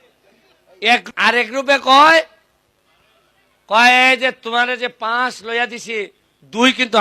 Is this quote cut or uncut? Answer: cut